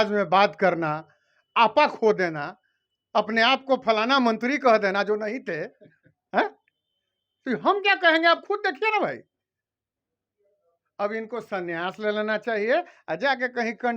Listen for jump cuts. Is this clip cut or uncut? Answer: uncut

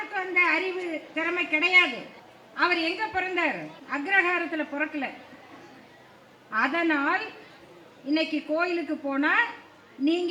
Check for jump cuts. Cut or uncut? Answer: uncut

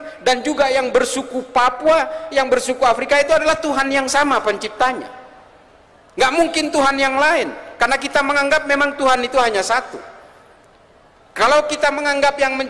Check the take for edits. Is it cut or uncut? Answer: uncut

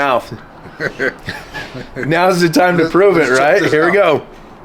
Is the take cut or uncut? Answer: uncut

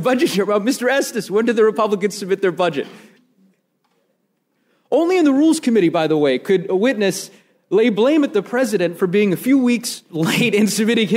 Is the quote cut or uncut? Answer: cut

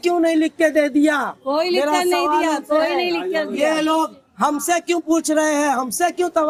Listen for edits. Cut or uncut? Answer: uncut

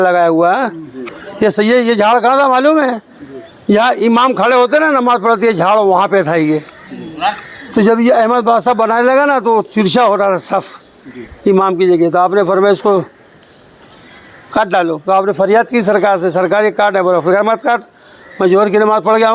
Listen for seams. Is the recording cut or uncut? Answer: cut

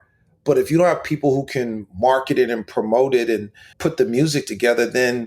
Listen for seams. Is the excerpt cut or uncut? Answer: cut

